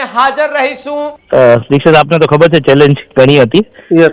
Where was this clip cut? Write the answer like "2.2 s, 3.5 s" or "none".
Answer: 1.2 s